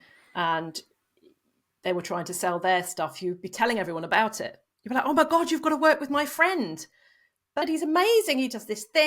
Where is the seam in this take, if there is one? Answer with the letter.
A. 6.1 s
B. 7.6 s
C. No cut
B